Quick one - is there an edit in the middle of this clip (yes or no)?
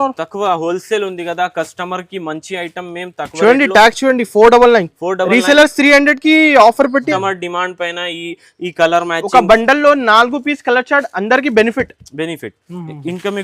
yes